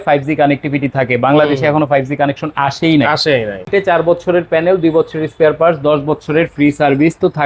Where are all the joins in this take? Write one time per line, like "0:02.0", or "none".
0:03.7